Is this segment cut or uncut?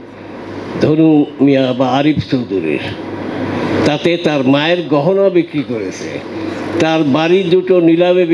uncut